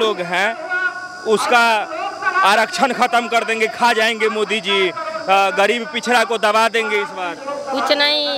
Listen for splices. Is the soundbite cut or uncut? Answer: uncut